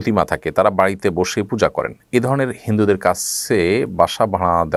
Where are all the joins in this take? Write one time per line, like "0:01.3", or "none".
none